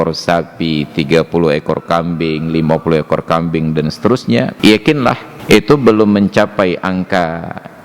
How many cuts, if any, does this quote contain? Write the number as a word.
two